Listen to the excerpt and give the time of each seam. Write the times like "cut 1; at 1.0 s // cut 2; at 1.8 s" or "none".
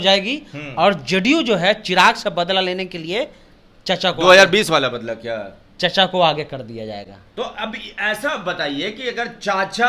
none